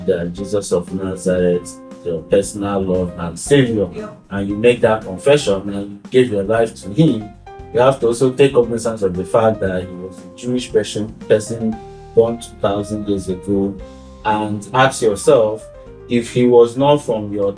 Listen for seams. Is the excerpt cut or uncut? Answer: uncut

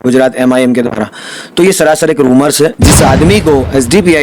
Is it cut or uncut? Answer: cut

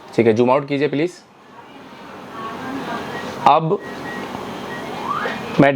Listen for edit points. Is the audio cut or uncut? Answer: uncut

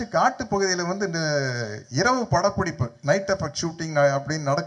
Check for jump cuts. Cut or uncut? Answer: uncut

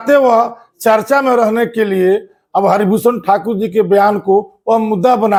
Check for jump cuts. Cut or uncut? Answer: uncut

